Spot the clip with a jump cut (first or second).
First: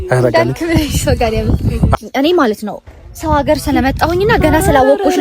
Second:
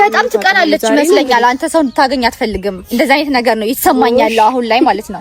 first